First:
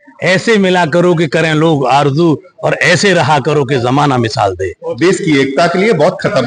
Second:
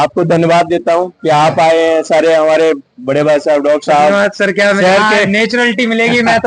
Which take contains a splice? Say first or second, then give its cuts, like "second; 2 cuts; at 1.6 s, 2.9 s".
first; 1 cut; at 4.9 s